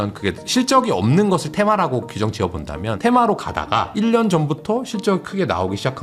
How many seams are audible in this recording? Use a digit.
1